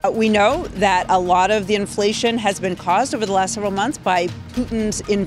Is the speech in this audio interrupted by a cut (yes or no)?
no